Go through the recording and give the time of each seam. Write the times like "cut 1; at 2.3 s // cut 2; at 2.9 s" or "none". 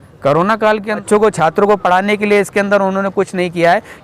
cut 1; at 1.0 s